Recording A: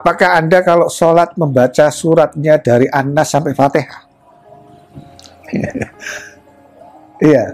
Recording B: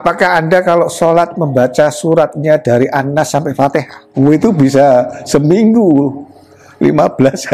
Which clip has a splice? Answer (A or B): B